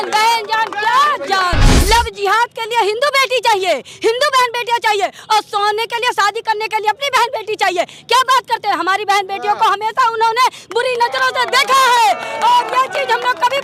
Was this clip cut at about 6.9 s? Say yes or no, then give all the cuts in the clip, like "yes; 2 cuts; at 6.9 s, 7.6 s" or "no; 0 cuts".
no; 1 cut; at 1.7 s